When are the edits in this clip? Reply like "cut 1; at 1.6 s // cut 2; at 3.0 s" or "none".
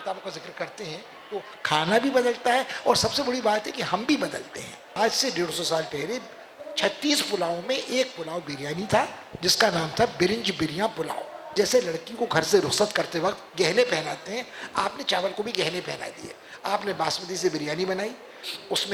cut 1; at 5.0 s // cut 2; at 11.4 s